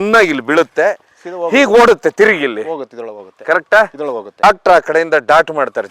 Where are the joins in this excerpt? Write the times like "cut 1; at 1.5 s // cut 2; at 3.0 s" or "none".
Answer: none